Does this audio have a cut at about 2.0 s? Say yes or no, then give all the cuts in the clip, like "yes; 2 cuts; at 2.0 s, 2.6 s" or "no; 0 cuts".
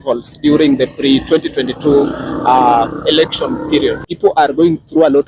no; 1 cut; at 4.1 s